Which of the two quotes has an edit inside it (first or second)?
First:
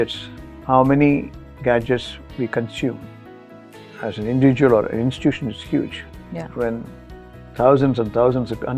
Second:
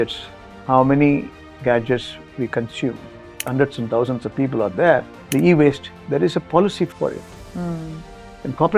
second